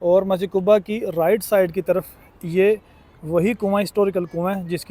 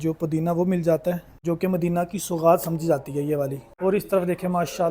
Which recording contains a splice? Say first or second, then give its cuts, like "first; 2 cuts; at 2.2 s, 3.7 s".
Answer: second; 2 cuts; at 1.3 s, 3.6 s